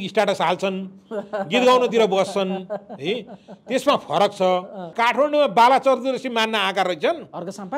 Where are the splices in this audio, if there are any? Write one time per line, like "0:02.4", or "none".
0:04.9